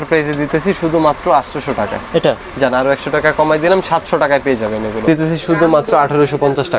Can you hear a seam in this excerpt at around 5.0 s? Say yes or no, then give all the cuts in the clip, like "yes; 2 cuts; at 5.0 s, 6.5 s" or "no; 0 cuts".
yes; 1 cut; at 5.0 s